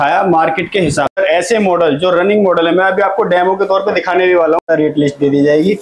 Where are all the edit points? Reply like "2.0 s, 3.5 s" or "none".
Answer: 1.1 s, 4.6 s